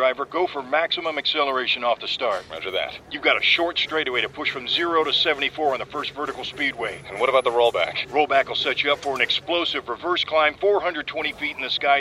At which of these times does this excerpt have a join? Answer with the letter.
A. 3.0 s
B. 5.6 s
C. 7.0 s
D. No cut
D